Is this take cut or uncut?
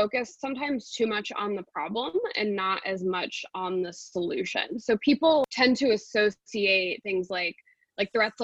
cut